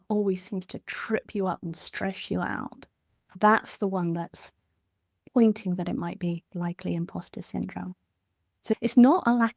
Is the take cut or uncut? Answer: cut